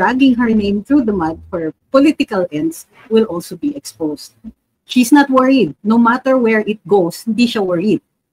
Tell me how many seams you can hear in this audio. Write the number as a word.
one